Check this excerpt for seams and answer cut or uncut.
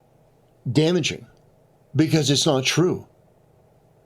uncut